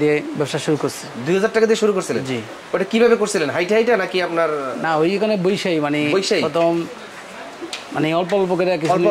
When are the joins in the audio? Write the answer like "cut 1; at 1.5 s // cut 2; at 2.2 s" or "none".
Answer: none